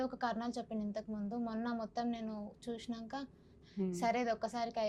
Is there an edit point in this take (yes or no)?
yes